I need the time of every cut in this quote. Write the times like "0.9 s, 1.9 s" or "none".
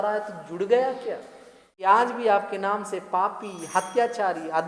1.9 s